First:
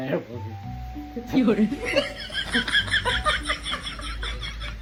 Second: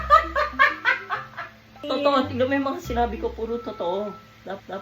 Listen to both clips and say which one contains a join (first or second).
second